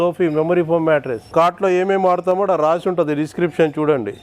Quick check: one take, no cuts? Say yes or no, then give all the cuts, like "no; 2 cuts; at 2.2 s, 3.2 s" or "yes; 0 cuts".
no; 1 cut; at 1.3 s